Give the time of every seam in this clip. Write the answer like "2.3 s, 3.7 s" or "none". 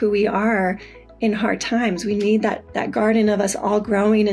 2.7 s